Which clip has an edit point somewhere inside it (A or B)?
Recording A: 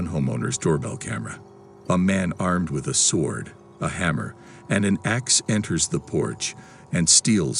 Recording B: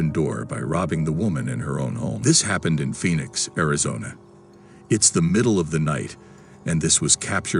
B